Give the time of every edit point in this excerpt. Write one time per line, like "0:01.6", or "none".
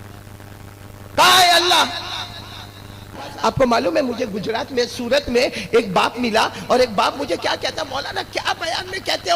0:03.3